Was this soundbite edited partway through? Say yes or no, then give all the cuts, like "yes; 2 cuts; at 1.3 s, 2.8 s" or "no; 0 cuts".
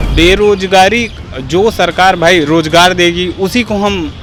no; 0 cuts